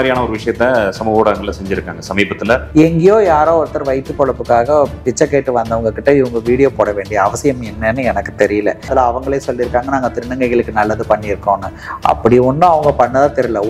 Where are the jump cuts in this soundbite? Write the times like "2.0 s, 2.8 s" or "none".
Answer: 2.7 s, 8.9 s